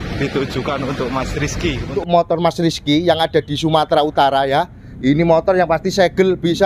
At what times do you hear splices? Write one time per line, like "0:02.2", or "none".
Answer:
0:01.9